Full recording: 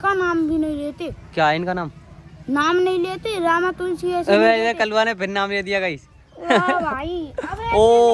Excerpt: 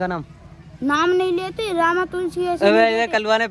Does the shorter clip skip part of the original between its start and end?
no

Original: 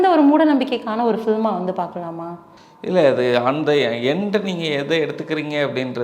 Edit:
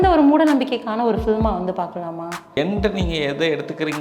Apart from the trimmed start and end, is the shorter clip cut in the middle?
yes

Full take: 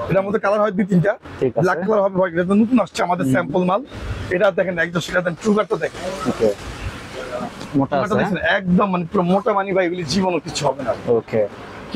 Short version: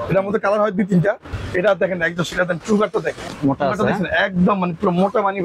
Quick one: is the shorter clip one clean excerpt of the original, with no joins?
no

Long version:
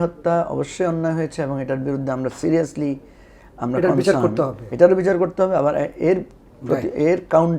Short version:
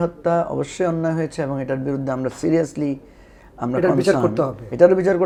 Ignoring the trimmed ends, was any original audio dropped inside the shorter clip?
no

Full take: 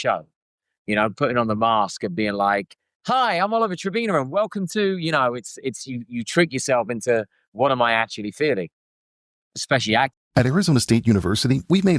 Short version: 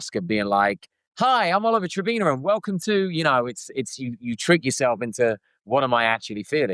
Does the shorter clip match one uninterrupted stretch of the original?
yes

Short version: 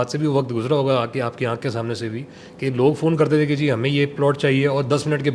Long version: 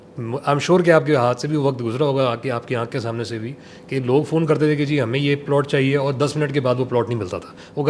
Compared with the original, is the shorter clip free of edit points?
yes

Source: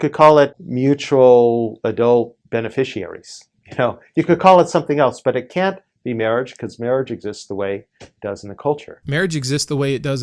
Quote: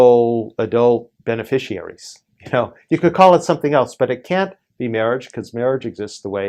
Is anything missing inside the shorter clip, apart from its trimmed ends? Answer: no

